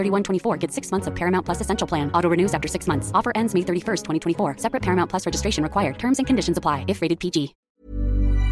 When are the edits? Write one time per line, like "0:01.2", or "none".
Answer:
0:07.6